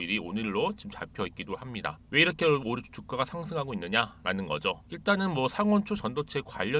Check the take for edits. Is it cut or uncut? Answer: cut